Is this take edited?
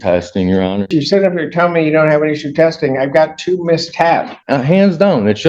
yes; 2 cuts; at 0.9 s, 4.4 s

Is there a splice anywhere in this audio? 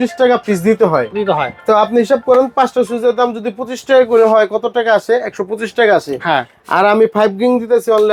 no; 0 cuts

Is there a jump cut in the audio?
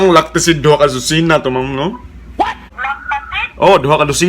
yes; 1 cut; at 2.7 s

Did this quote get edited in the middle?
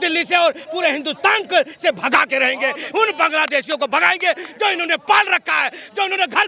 no; 0 cuts

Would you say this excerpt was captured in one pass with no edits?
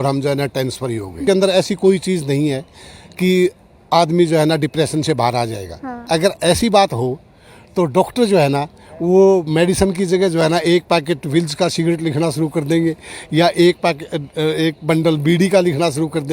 no; 1 cut; at 1.2 s

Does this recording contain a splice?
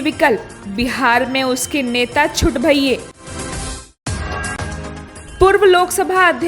yes; 2 cuts; at 3.1 s, 5.1 s

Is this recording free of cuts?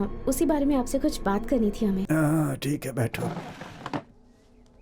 no; 1 cut; at 2.0 s

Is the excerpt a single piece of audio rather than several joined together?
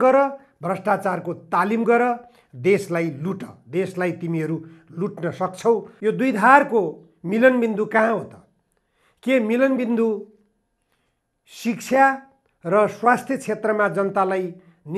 no; 1 cut; at 5.9 s

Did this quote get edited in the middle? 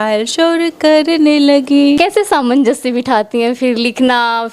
yes; 1 cut; at 2.0 s

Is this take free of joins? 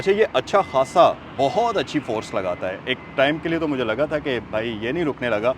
yes; 0 cuts

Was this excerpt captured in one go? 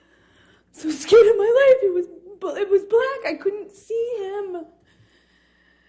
yes; 0 cuts

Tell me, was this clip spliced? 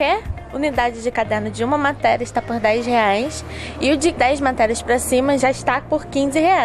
yes; 2 cuts; at 4.2 s, 5.4 s

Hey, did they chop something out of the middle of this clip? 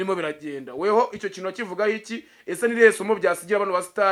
no; 0 cuts

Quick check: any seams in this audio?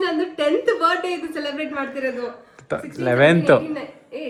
no; 0 cuts

